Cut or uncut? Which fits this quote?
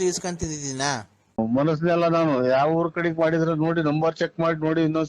cut